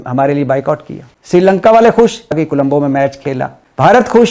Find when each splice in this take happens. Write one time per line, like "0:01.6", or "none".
0:02.4

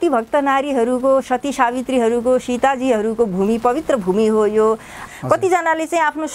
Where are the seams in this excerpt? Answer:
0:05.0

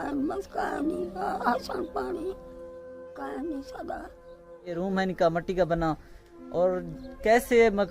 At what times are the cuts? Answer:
0:04.7

